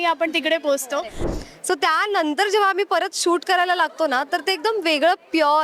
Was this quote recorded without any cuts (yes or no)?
no